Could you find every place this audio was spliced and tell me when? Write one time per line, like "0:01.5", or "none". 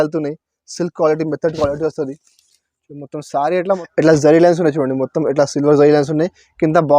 0:03.8